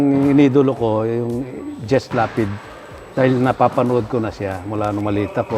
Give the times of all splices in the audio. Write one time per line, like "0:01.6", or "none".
none